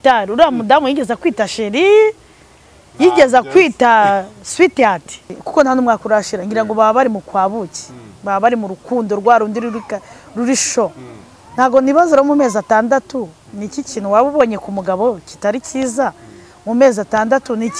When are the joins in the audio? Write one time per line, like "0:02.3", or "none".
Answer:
0:05.2